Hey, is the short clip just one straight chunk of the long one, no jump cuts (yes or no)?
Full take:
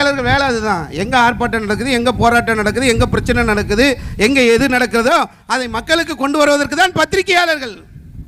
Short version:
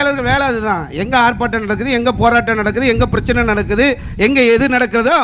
yes